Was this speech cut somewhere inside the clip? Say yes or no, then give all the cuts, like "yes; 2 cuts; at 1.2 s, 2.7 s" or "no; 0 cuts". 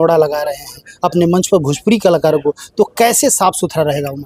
no; 0 cuts